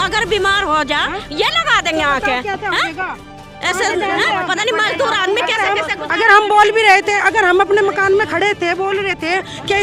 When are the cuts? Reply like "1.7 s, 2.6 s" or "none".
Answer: none